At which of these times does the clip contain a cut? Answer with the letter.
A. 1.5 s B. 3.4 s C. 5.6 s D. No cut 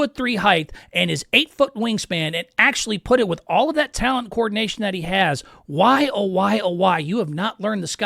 D